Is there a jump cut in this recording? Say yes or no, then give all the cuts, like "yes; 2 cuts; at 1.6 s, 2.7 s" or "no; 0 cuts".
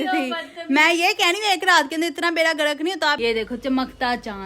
yes; 1 cut; at 3.2 s